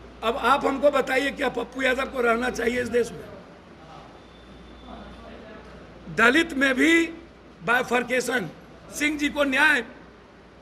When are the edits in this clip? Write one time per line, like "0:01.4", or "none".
0:08.9